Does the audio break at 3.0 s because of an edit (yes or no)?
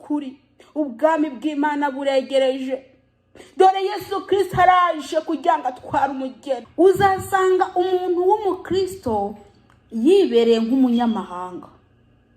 no